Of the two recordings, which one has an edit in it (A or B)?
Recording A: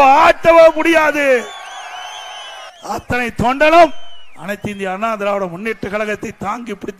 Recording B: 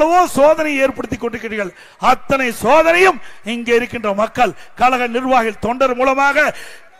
A